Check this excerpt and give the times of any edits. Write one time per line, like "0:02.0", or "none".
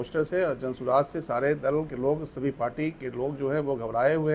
none